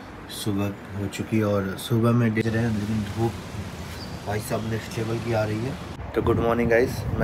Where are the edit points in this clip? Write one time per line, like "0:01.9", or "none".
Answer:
0:02.4
0:06.0